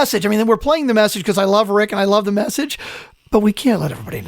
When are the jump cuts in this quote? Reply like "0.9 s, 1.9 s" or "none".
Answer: 2.8 s